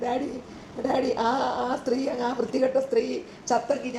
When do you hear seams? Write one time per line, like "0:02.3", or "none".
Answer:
none